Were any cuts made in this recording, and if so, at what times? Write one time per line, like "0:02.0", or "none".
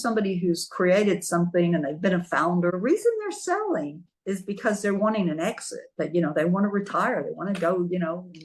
0:02.7